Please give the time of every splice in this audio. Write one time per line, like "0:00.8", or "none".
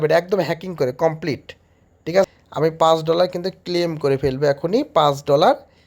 0:02.3